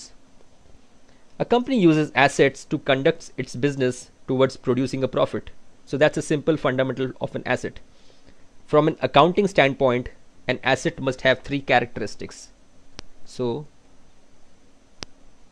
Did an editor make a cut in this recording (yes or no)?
no